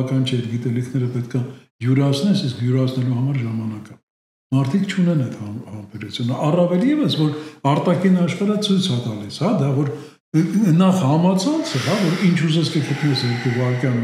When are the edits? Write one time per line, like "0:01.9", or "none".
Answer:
none